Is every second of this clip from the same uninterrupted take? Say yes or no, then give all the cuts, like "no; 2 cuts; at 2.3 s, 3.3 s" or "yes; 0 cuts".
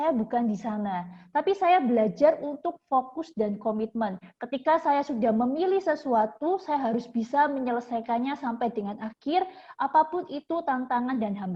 yes; 0 cuts